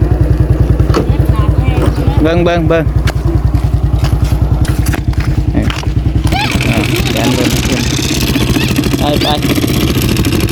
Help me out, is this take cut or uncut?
uncut